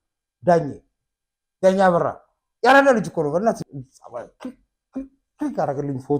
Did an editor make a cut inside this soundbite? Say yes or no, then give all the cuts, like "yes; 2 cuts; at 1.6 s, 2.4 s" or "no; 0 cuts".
yes; 1 cut; at 3.6 s